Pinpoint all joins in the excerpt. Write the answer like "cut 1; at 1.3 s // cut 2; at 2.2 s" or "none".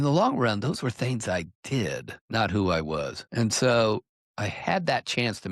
cut 1; at 2.1 s // cut 2; at 3.2 s